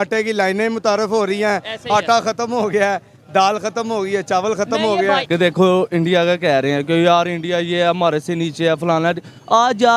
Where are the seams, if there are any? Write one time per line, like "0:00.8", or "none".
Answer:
0:05.2